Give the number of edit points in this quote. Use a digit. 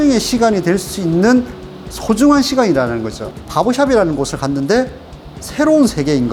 1